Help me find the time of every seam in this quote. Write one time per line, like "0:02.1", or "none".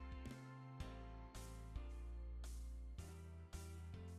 none